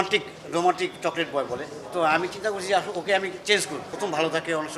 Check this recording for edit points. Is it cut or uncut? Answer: cut